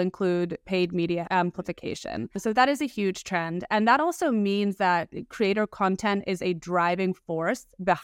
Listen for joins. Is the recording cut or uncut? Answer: cut